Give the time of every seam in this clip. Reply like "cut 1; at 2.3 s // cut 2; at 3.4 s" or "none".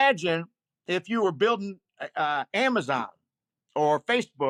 none